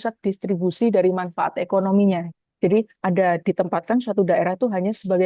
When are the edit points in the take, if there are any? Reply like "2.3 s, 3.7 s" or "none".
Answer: 2.3 s